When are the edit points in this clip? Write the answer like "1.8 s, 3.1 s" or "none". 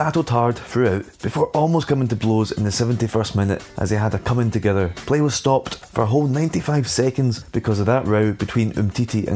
1.2 s, 3.7 s, 5.0 s, 5.8 s, 7.5 s